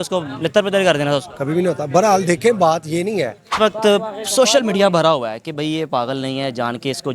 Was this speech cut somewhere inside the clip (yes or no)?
yes